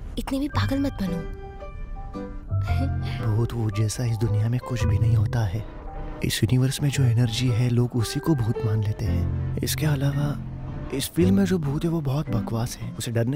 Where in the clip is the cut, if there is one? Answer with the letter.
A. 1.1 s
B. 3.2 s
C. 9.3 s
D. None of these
B